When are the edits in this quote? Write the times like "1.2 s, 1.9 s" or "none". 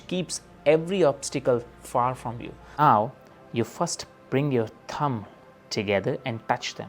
2.8 s